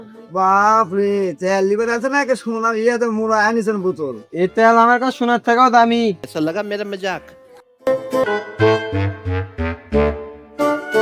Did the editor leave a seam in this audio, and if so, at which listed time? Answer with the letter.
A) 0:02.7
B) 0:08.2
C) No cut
B